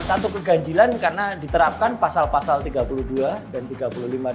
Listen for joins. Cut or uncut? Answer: uncut